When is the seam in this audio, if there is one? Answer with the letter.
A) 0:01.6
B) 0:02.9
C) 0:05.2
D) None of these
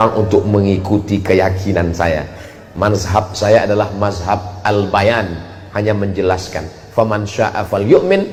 D